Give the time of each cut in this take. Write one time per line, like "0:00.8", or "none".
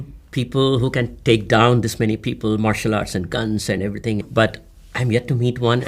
0:04.2